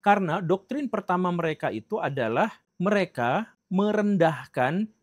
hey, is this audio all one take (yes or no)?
yes